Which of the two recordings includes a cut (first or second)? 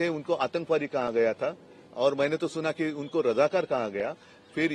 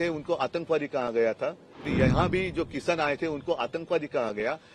second